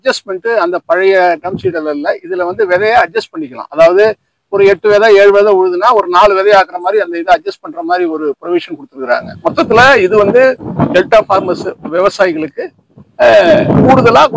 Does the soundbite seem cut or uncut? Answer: cut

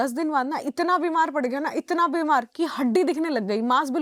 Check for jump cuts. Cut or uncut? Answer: uncut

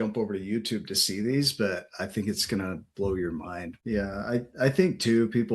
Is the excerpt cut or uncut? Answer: cut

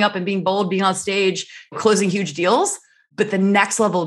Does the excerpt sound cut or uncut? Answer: cut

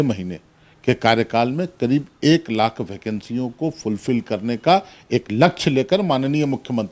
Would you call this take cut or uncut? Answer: uncut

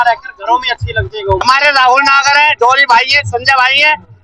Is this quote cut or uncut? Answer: cut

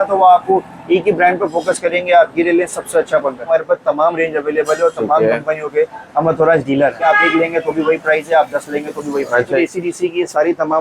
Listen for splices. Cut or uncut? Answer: cut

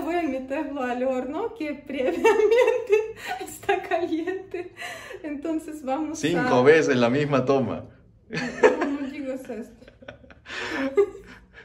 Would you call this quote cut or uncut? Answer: uncut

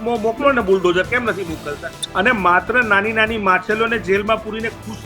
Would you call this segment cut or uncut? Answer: cut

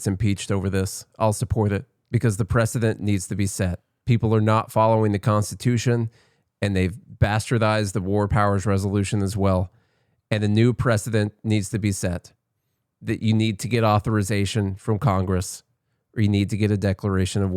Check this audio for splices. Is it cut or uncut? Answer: cut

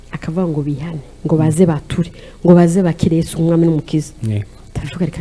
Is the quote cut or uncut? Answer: uncut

